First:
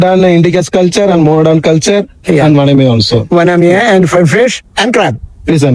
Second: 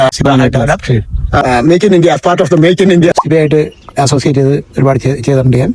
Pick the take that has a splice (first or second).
second